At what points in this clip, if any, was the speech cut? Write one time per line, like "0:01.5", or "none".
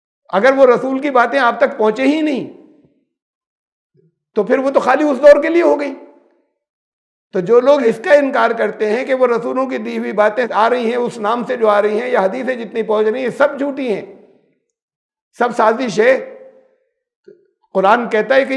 0:07.8
0:10.5